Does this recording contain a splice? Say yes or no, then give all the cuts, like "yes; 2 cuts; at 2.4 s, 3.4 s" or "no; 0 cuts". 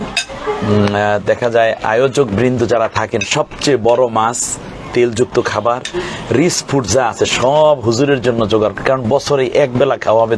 no; 0 cuts